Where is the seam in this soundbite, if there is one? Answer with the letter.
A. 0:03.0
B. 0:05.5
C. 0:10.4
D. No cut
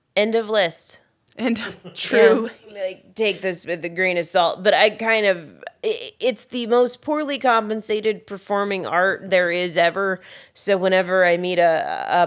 A